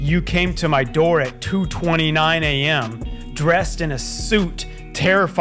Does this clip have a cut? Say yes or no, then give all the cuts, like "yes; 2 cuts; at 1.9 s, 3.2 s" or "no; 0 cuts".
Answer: no; 0 cuts